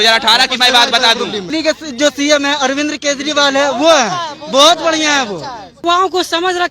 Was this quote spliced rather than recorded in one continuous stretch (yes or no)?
yes